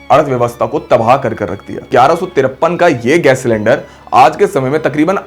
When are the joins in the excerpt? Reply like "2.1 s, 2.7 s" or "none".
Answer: 1.8 s